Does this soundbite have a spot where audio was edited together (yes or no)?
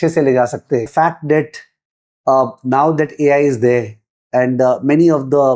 yes